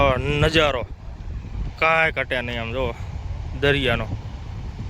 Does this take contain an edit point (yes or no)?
no